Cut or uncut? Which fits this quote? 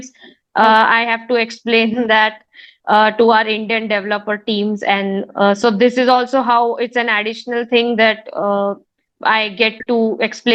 uncut